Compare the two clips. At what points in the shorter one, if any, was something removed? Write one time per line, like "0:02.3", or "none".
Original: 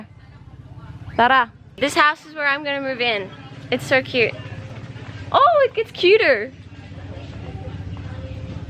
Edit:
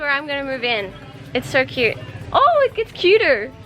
0:02.1